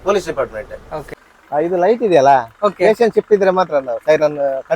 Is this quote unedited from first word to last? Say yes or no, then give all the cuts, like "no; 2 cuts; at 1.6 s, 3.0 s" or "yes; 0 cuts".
no; 1 cut; at 1.1 s